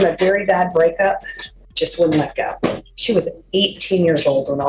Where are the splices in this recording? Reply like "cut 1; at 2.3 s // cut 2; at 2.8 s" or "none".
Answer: none